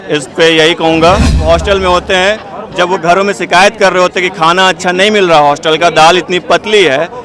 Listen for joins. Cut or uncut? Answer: cut